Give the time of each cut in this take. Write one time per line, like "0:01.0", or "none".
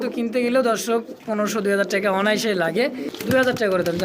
0:03.1